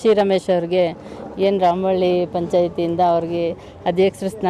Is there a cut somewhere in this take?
no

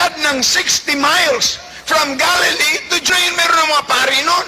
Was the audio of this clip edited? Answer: yes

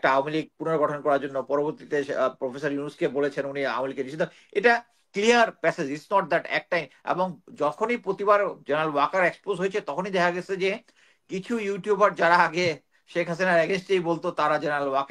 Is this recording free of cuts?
yes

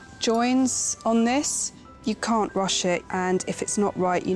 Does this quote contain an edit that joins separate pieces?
yes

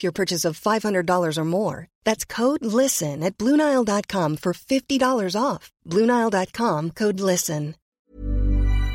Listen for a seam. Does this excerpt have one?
yes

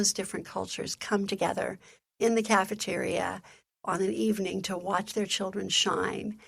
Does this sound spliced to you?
no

